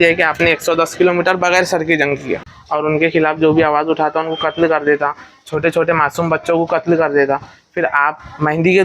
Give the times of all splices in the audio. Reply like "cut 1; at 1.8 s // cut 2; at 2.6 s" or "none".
cut 1; at 2.5 s